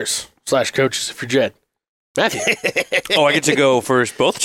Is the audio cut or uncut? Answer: uncut